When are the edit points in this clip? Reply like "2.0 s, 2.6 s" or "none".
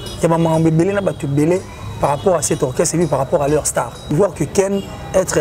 4.1 s